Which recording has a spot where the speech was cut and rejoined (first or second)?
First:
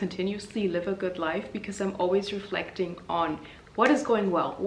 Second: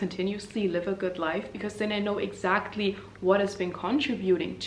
second